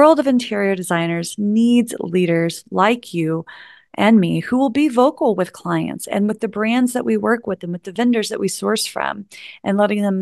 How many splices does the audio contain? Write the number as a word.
one